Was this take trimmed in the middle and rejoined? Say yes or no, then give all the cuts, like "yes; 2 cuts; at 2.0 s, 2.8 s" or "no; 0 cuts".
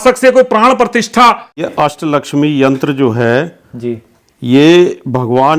yes; 1 cut; at 1.7 s